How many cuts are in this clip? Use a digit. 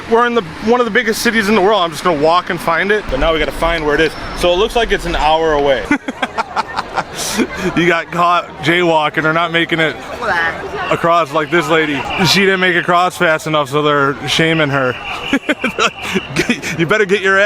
3